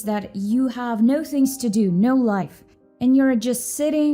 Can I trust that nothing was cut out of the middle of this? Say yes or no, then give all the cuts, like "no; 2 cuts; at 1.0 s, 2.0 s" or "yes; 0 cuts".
yes; 0 cuts